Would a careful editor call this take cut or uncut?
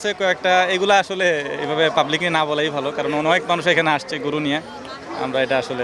uncut